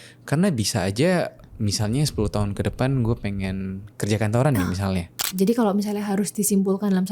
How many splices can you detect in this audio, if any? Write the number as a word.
one